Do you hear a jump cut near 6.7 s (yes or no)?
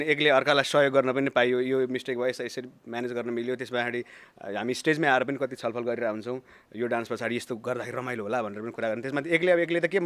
no